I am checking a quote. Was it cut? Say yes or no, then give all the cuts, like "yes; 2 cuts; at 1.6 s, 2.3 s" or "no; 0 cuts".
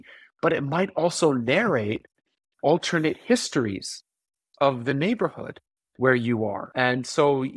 yes; 1 cut; at 6.6 s